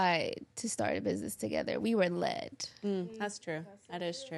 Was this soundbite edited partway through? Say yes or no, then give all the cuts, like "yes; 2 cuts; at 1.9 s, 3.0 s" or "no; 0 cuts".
no; 0 cuts